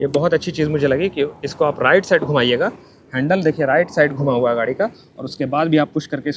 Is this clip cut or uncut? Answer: uncut